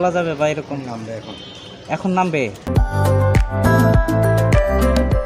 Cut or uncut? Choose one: cut